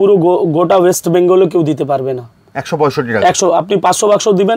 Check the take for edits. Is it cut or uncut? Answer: uncut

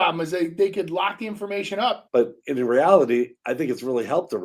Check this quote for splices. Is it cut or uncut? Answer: cut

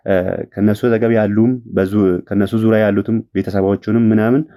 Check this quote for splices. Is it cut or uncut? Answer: uncut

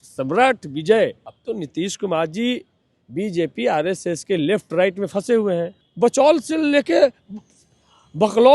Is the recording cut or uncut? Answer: cut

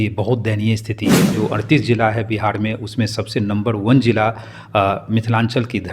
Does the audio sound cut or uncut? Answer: cut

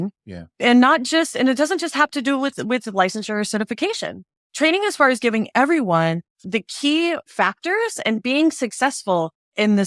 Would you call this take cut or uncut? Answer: uncut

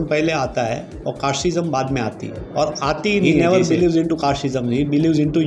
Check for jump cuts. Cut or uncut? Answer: cut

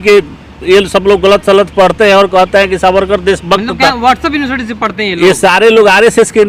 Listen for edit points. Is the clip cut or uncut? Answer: uncut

